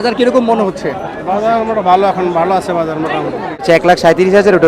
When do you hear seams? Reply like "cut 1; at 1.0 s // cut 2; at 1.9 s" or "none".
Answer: cut 1; at 3.6 s